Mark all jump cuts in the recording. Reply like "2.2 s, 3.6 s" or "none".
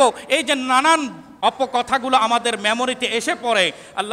1.2 s